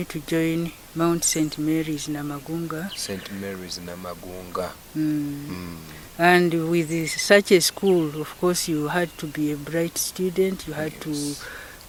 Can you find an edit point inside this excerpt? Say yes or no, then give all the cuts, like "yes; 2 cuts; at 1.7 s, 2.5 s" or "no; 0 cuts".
no; 0 cuts